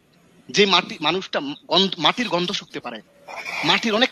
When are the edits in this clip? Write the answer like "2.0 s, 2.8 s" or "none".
none